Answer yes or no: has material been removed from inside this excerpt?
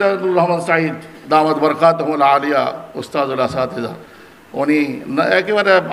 yes